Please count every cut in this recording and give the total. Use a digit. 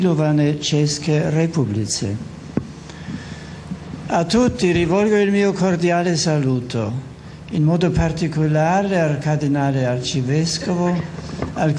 1